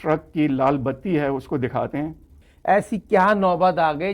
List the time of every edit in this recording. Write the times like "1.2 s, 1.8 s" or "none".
2.4 s

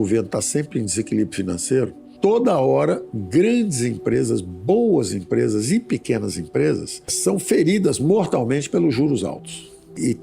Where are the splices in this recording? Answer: 2.0 s, 3.1 s

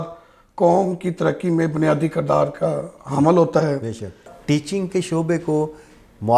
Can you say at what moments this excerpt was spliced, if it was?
4.3 s

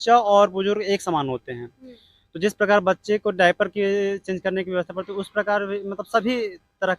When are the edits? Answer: none

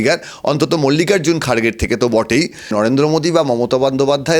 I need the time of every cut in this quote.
2.7 s

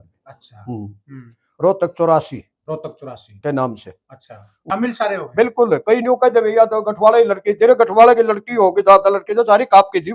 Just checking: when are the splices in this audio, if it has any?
4.6 s

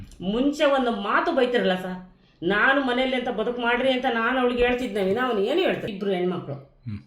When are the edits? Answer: 5.9 s

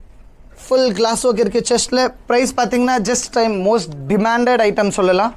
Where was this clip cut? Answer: 3.2 s

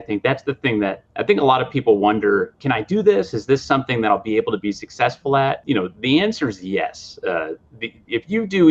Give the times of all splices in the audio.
1.1 s, 2.6 s, 5.6 s

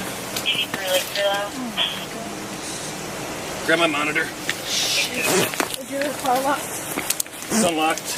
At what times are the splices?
none

